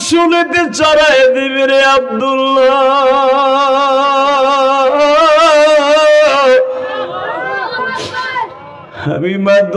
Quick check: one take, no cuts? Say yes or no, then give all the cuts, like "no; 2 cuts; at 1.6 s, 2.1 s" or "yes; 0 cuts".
yes; 0 cuts